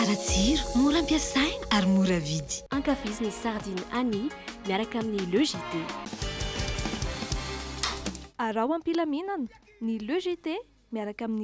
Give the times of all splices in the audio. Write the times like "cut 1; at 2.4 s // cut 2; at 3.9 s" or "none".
none